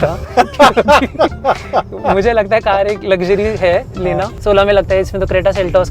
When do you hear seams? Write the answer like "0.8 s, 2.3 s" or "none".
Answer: 4.3 s